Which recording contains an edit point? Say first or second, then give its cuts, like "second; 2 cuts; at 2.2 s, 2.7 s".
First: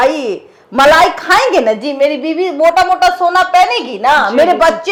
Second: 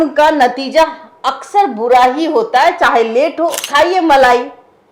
second; 1 cut; at 3.6 s